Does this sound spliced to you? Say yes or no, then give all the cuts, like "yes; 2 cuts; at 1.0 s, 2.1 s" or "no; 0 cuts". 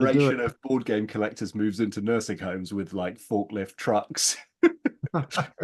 no; 0 cuts